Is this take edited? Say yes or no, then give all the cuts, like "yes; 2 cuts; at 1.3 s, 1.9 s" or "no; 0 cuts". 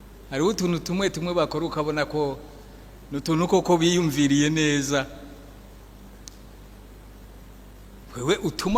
no; 0 cuts